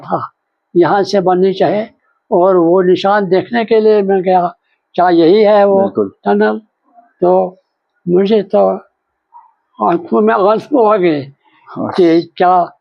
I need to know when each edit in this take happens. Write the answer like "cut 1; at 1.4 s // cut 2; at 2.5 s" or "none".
none

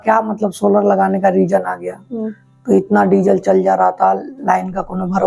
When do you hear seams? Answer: none

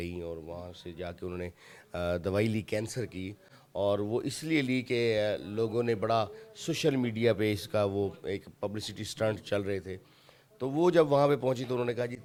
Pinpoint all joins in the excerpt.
none

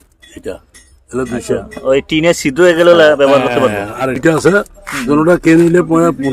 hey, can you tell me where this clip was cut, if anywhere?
cut 1; at 4.2 s

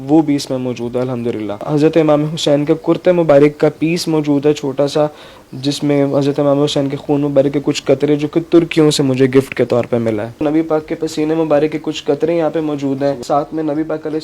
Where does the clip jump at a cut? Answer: cut 1; at 1.6 s // cut 2; at 10.3 s // cut 3; at 13.2 s

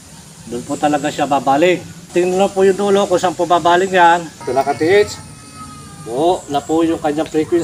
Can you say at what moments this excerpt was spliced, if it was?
cut 1; at 2.1 s // cut 2; at 4.4 s

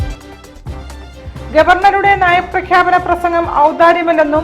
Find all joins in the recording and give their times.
cut 1; at 1.1 s

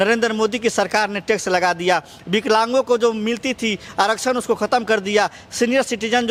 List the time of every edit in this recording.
none

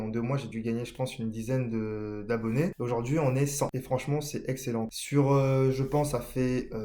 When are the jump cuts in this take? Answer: cut 1; at 2.8 s // cut 2; at 3.8 s // cut 3; at 5.0 s

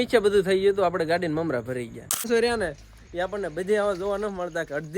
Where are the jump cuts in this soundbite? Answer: cut 1; at 2.3 s

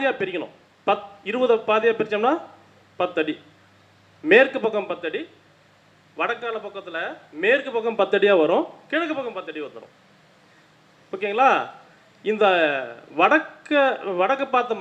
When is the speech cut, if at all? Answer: none

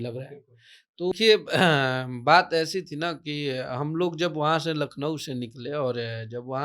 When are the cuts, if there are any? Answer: cut 1; at 1.1 s

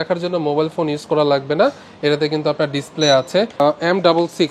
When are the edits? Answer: cut 1; at 3.6 s

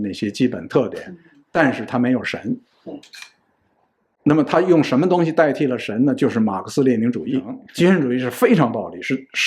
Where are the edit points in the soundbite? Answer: cut 1; at 7.6 s

